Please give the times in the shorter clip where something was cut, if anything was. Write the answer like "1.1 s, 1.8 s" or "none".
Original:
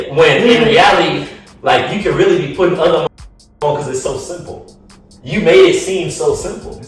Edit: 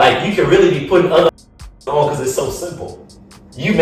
none